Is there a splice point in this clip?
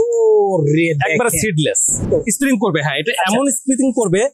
yes; 1 cut; at 2.1 s

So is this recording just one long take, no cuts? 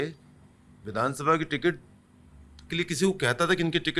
yes; 0 cuts

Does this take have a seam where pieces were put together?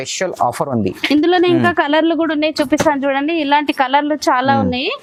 no; 0 cuts

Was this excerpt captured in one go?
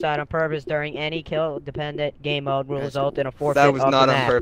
yes; 0 cuts

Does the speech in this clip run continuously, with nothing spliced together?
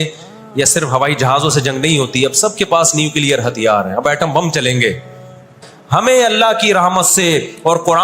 no; 1 cut; at 5.7 s

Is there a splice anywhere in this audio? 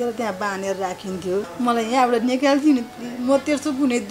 yes; 1 cut; at 1.5 s

